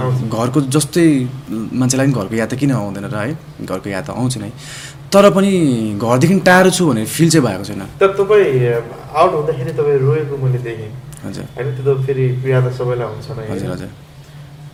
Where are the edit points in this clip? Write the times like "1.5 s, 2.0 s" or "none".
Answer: none